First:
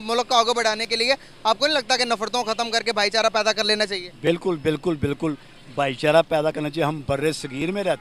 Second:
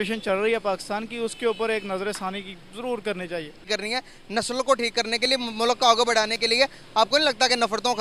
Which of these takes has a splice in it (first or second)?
second